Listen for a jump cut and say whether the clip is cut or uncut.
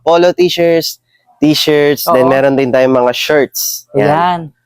uncut